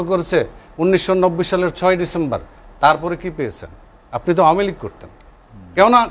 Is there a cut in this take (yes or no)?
no